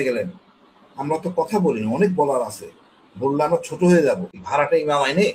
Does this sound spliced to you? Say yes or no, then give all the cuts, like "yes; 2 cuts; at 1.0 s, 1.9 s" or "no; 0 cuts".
yes; 1 cut; at 4.4 s